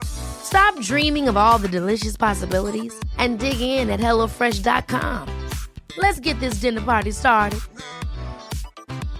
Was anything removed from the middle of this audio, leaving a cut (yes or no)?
no